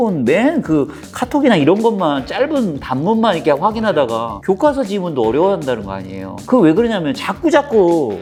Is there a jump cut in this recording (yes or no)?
no